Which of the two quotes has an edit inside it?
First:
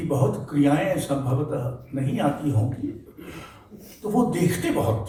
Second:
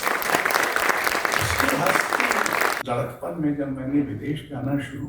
second; 1 cut; at 2.8 s

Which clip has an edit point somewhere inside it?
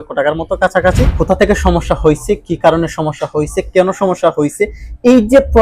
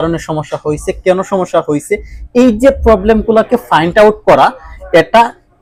first; 1 cut; at 1.1 s

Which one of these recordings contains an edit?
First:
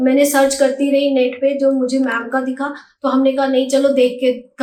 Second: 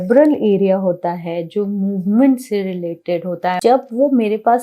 second; 1 cut; at 3.6 s

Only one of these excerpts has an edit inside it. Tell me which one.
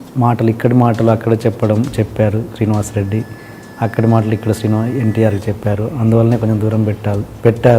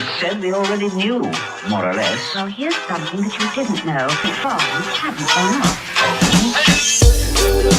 second; 1 cut; at 4.3 s

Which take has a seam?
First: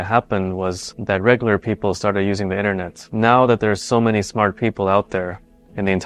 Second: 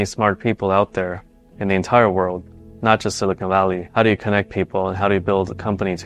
first; 1 cut; at 3.0 s

